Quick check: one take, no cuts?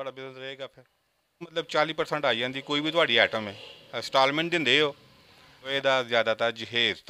no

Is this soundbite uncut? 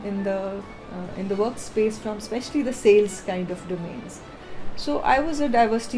yes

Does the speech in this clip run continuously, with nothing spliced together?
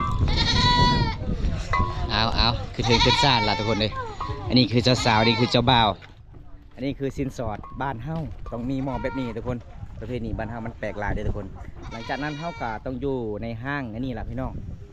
yes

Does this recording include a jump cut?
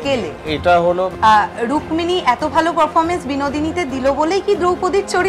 yes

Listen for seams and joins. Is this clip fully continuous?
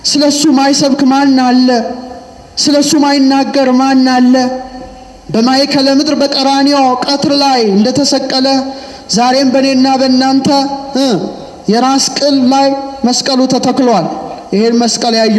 yes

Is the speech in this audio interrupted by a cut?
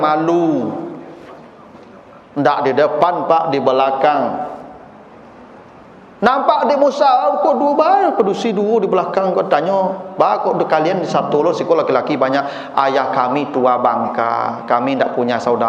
no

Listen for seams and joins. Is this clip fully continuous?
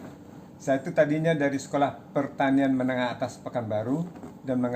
yes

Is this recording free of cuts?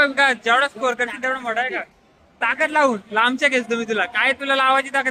yes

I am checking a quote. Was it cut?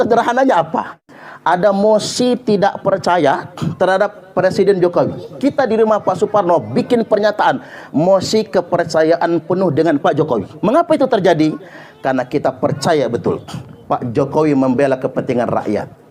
yes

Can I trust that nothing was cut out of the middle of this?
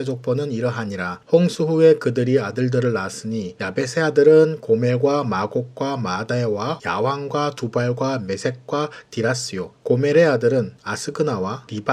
no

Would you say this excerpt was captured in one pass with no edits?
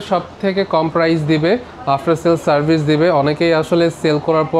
yes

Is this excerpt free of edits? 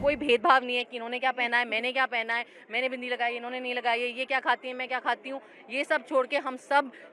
yes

